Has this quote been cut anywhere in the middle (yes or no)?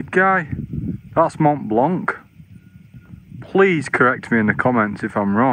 no